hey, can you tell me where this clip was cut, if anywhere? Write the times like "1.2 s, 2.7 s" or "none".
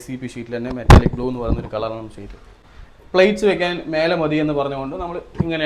2.6 s

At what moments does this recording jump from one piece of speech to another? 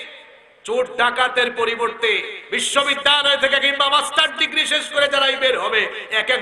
none

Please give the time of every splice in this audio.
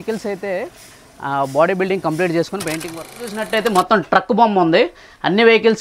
3.3 s

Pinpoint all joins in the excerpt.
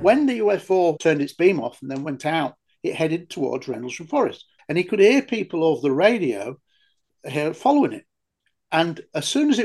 1.0 s, 4.5 s

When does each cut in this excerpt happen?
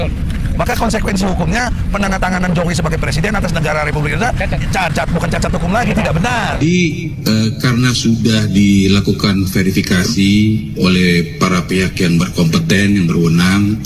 none

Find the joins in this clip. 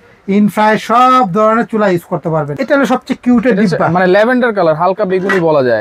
2.5 s

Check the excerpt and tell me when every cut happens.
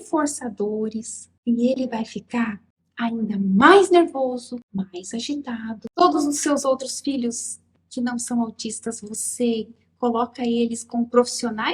4.6 s, 5.8 s

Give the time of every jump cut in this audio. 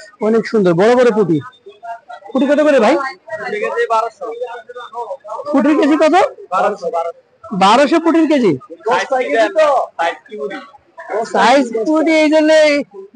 none

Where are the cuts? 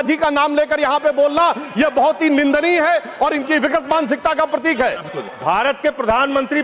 5.1 s

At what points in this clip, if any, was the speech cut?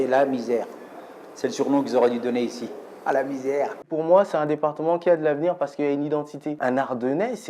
3.8 s, 6.6 s

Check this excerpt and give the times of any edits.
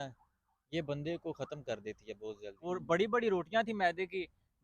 2.6 s

